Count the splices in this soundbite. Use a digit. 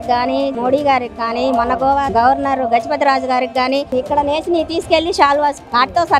2